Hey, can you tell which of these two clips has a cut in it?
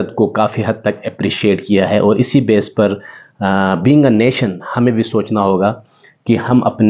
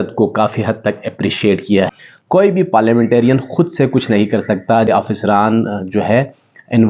second; 2 cuts; at 1.9 s, 4.9 s

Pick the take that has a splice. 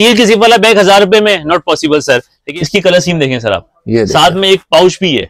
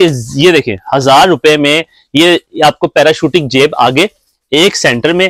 first; 1 cut; at 2.4 s

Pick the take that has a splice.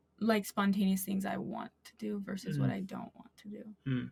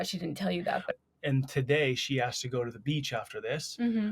second; 1 cut; at 0.9 s

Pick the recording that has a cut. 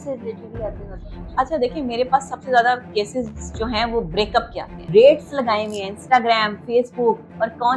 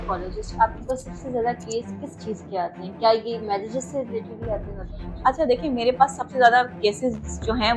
first; 1 cut; at 4.8 s

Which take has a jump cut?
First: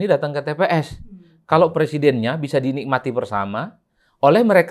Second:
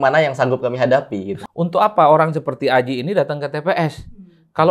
second; 1 cut; at 1.3 s

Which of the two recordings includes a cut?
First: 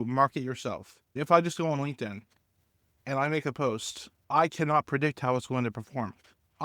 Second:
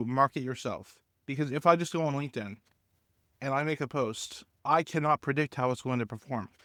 first; 1 cut; at 1.2 s

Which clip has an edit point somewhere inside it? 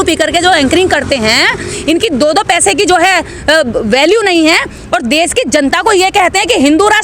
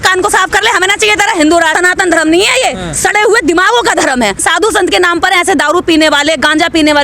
second; 2 cuts; at 1.7 s, 4.4 s

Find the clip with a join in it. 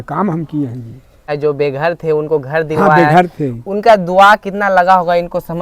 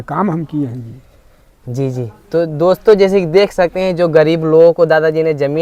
first; 1 cut; at 1.3 s

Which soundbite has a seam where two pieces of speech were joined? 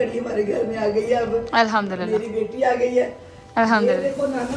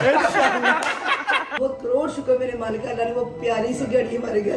second; 1 cut; at 1.5 s

